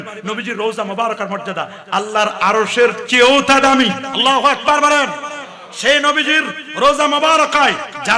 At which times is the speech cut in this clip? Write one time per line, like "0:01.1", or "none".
0:04.1